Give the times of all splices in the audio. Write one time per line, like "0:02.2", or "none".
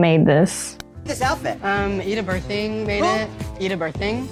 none